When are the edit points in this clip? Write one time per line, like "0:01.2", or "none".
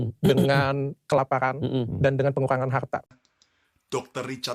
0:03.1